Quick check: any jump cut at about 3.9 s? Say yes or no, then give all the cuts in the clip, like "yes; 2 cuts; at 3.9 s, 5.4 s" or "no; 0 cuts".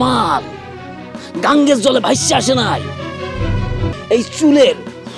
yes; 1 cut; at 3.9 s